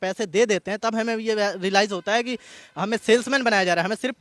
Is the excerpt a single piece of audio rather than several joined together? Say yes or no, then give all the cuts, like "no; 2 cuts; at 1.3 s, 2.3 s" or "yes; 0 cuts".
yes; 0 cuts